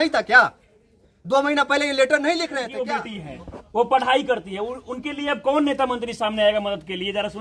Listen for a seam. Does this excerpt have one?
yes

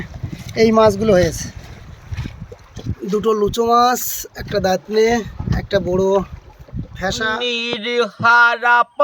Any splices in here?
yes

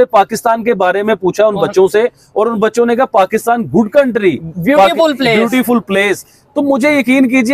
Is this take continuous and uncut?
yes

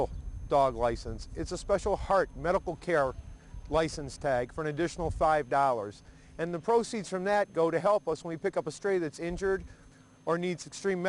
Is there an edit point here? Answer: yes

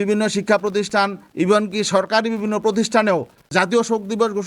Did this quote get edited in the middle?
yes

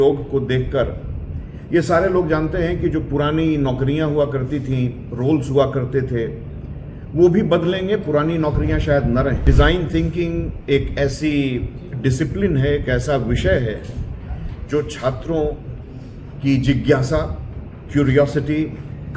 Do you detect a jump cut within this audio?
yes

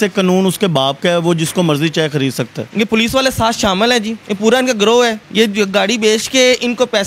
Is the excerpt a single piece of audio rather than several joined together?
no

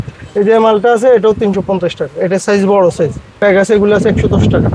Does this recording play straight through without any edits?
no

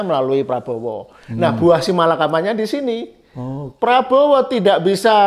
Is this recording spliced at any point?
no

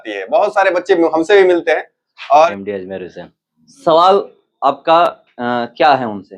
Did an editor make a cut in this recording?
yes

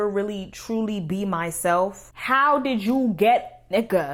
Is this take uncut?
no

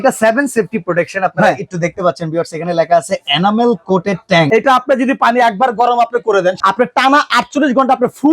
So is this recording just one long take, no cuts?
no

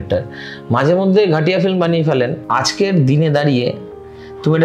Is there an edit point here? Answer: yes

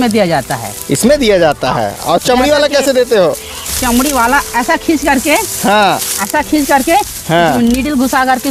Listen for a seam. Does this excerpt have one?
no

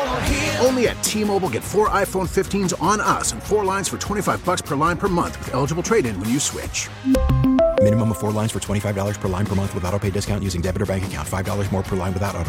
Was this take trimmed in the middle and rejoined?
no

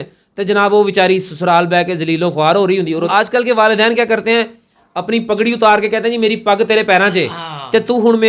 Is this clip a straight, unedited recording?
no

